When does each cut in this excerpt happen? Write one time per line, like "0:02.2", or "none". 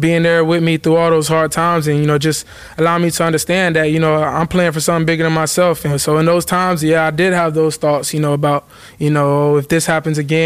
0:06.0